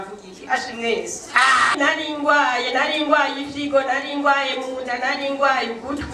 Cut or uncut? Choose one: cut